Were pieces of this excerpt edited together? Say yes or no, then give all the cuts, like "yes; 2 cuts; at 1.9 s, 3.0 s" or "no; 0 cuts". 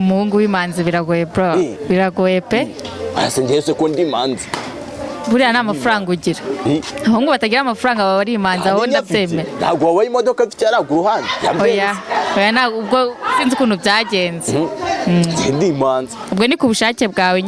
no; 0 cuts